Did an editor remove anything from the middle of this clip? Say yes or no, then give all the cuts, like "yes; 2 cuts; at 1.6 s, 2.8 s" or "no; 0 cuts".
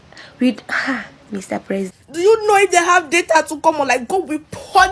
yes; 1 cut; at 2.0 s